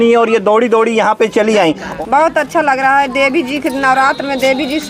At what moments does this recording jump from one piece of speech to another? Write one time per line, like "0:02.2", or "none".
0:01.9

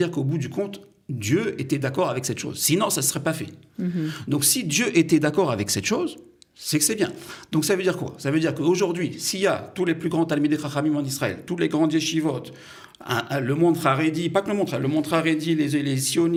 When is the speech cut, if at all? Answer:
none

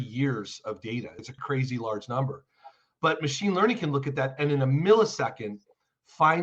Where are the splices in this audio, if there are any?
0:01.2

